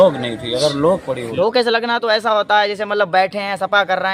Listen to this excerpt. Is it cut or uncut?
cut